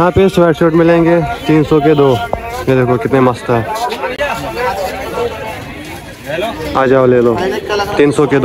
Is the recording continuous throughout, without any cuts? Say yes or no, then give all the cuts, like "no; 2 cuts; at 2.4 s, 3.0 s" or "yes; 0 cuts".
yes; 0 cuts